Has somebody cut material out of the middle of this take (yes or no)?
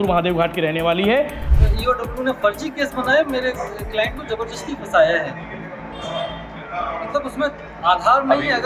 yes